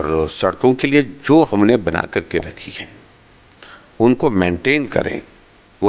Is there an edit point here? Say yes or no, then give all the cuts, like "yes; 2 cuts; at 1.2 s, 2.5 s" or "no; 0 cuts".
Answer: no; 0 cuts